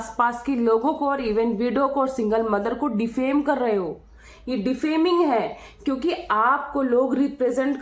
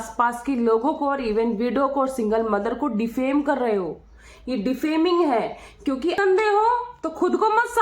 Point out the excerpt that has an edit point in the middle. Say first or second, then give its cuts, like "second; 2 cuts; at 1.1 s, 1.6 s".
second; 1 cut; at 6.2 s